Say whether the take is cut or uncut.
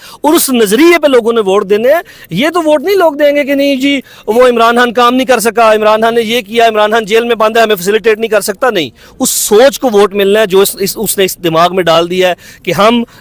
uncut